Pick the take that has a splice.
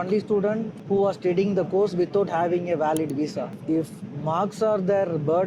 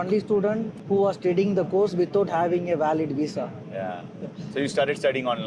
first; 1 cut; at 3.6 s

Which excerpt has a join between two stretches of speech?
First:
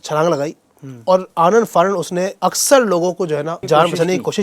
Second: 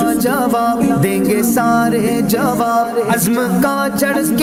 first; 2 cuts; at 2.3 s, 3.6 s

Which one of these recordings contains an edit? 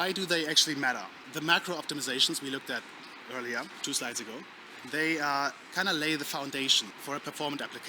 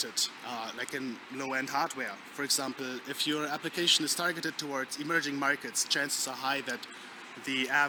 first; 3 cuts; at 1.3 s, 3.8 s, 6.9 s

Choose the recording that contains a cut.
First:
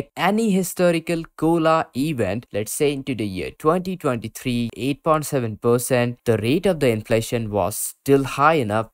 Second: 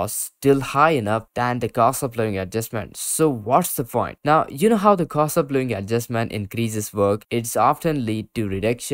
first; 3 cuts; at 2.5 s, 4.7 s, 6.2 s

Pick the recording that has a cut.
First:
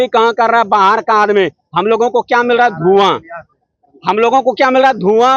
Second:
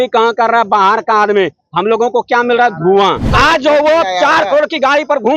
second; 1 cut; at 3.3 s

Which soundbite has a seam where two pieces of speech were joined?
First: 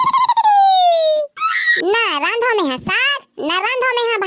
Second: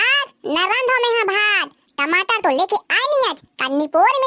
first; 1 cut; at 1.0 s

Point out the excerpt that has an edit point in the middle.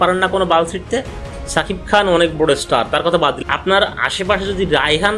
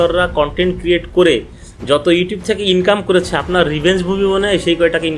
first; 2 cuts; at 1.2 s, 3.4 s

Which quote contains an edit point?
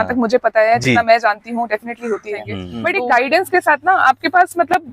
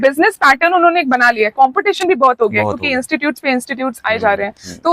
first; 1 cut; at 2.6 s

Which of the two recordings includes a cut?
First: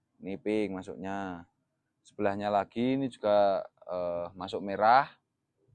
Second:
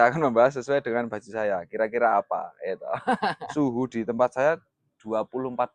second; 1 cut; at 3.4 s

